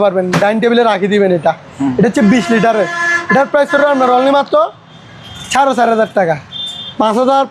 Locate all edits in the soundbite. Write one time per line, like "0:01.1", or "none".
none